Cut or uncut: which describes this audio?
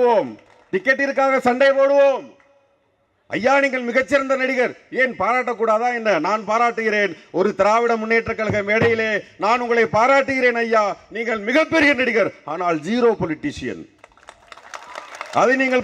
uncut